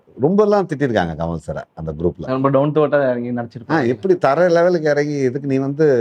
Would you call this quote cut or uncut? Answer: uncut